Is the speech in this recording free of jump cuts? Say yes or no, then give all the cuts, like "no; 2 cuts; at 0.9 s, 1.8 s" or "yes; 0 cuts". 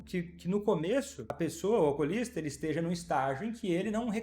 no; 1 cut; at 1.2 s